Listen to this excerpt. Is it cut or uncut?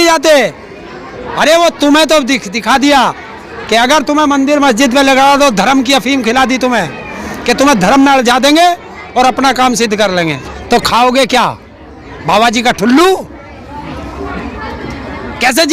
cut